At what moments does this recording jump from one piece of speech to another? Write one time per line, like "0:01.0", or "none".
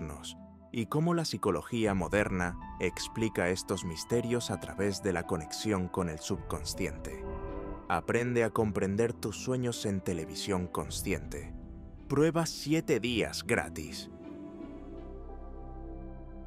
0:15.1